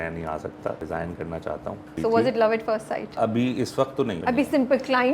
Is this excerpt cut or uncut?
cut